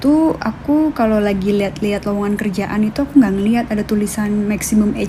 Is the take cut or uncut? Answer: uncut